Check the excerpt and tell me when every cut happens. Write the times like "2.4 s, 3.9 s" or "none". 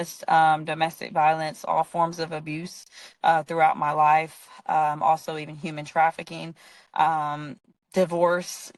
none